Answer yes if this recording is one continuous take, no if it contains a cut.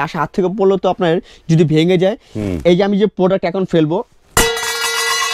yes